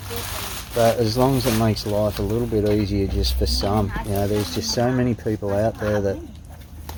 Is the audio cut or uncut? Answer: uncut